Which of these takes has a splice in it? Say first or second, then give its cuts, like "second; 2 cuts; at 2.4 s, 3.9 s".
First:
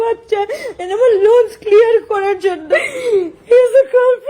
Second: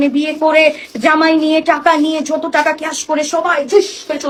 first; 1 cut; at 2.6 s